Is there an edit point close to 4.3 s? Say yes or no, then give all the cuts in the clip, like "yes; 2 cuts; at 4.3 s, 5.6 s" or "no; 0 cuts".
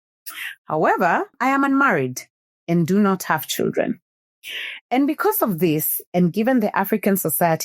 no; 1 cut; at 1.3 s